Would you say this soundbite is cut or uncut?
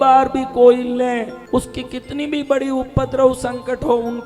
cut